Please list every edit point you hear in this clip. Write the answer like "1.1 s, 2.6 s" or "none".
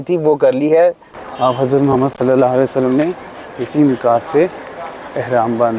1.1 s